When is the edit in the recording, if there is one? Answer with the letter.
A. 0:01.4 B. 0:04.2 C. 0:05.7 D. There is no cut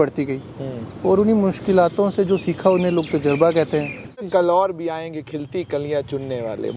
B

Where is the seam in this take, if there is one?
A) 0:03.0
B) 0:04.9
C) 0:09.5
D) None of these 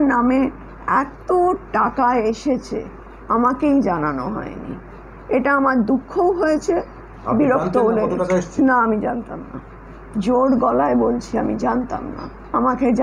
D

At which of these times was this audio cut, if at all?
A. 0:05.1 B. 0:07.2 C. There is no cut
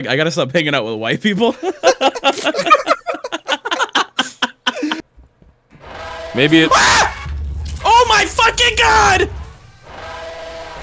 A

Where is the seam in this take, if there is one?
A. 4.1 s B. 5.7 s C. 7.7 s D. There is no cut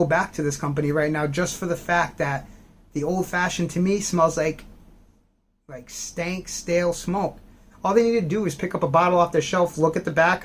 C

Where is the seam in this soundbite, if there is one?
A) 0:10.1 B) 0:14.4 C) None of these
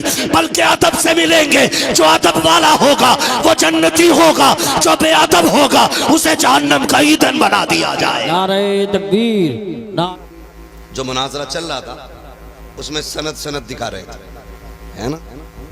A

